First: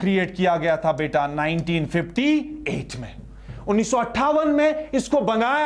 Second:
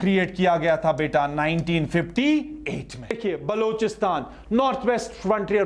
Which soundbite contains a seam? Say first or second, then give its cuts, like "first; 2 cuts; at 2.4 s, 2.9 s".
second; 1 cut; at 3.2 s